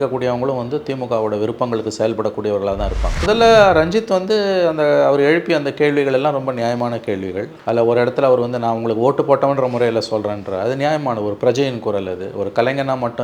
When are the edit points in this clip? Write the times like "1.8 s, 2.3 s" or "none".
3.2 s, 7.5 s